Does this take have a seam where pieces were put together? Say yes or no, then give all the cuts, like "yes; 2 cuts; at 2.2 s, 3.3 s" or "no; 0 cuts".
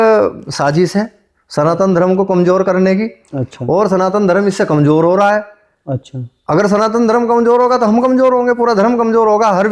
no; 0 cuts